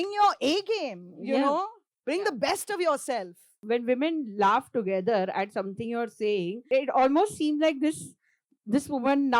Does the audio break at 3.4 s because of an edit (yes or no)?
yes